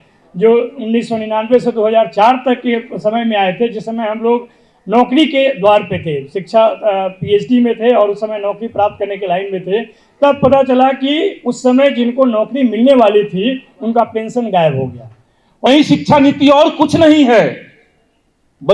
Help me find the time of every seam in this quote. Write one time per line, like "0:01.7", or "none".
0:15.7